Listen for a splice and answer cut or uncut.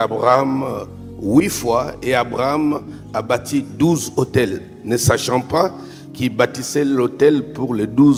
uncut